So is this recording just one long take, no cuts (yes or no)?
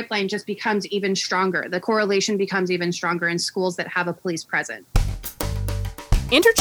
no